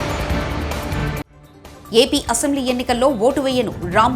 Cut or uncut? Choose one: cut